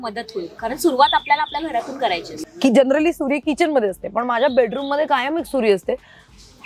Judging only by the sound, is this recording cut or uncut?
cut